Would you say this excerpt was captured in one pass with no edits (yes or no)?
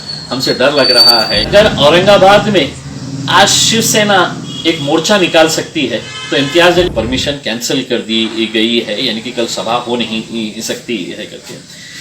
no